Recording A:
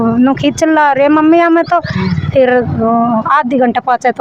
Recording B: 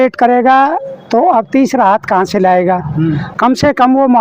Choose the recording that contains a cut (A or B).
B